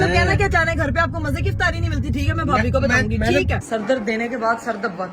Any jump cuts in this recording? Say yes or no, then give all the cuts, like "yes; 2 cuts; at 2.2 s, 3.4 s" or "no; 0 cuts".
yes; 1 cut; at 3.6 s